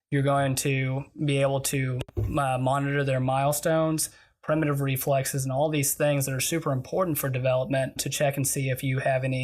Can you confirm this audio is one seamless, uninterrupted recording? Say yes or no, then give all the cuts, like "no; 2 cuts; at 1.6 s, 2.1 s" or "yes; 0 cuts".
no; 1 cut; at 8.0 s